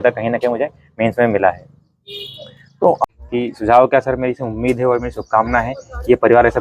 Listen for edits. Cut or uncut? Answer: cut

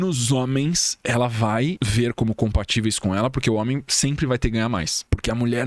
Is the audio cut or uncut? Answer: uncut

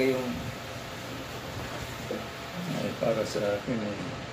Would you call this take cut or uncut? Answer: uncut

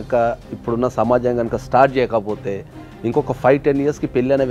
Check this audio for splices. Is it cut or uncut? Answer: uncut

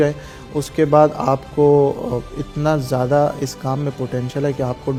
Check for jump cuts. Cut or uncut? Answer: uncut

